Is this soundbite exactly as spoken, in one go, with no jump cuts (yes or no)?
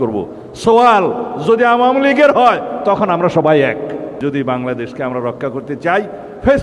no